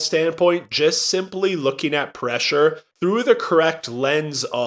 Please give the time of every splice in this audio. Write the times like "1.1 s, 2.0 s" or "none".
2.9 s